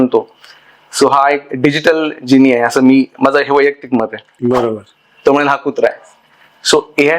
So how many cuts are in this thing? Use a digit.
1